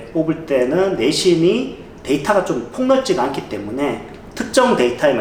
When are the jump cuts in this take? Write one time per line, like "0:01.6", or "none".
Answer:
none